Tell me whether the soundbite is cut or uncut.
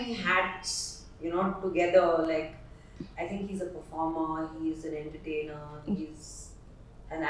uncut